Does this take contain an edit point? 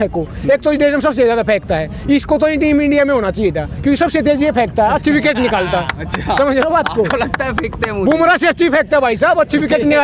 no; 0 cuts

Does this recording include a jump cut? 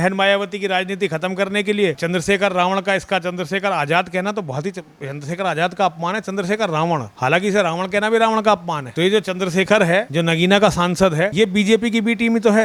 no; 0 cuts

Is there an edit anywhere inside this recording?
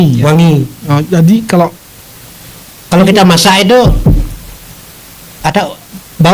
no; 0 cuts

